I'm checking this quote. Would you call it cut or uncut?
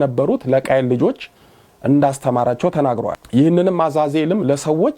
uncut